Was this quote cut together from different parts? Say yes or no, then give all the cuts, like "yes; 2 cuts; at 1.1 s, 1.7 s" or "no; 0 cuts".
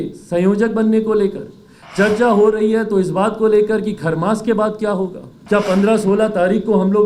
yes; 1 cut; at 5.3 s